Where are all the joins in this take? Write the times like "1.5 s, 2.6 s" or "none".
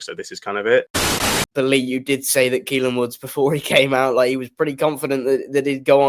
1.2 s